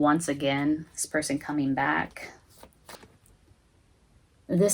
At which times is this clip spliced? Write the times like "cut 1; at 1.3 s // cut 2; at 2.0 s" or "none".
cut 1; at 3.0 s